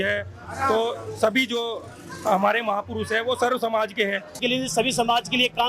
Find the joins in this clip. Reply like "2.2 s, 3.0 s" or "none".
4.4 s

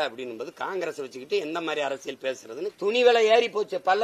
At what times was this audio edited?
2.7 s

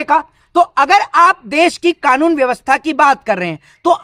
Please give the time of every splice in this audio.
none

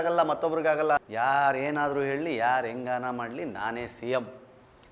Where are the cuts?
1.0 s

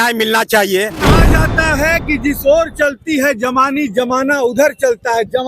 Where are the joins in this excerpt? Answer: 1.0 s

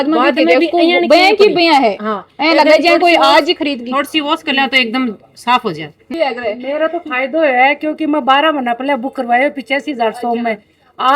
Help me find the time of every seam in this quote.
6.1 s

